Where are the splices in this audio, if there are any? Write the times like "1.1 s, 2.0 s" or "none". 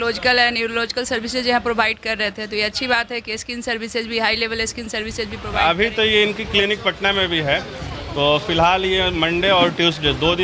5.4 s